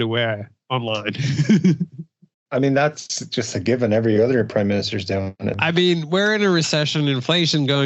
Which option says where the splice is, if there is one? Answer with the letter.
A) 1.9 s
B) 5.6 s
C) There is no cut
B